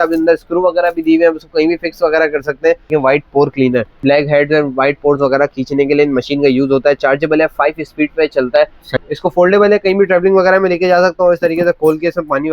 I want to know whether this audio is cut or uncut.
cut